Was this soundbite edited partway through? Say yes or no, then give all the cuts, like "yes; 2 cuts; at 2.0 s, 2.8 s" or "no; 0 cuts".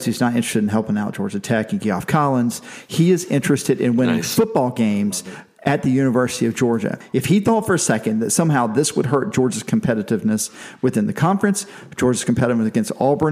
yes; 1 cut; at 7.0 s